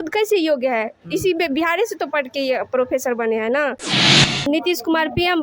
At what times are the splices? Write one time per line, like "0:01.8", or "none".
0:04.3